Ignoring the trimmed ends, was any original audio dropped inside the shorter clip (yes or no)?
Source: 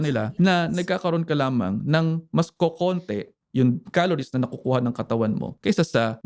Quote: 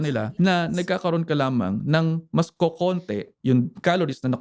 yes